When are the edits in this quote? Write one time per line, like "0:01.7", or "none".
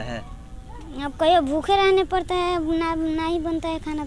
none